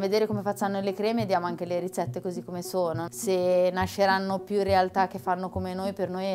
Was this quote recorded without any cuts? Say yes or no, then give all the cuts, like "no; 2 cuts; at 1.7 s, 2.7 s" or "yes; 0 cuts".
no; 1 cut; at 3.1 s